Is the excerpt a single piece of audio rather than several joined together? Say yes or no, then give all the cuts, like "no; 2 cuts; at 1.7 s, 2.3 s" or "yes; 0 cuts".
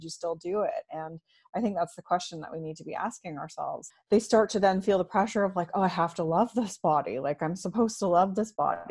no; 1 cut; at 3.8 s